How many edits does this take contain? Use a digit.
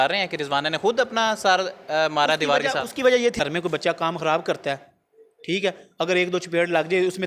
1